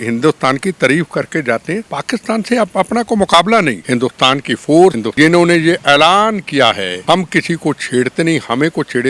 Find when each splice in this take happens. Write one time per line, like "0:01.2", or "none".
0:01.9
0:03.8
0:05.0
0:06.9